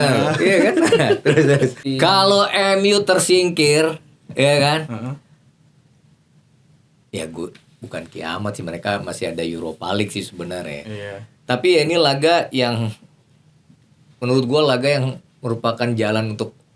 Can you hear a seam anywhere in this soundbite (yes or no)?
yes